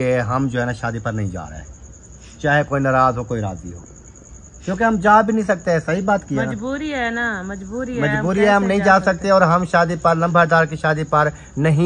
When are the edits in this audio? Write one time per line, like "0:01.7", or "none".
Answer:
none